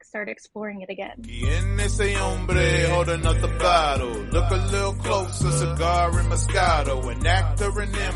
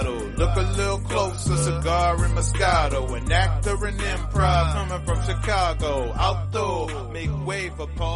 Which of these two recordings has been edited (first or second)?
first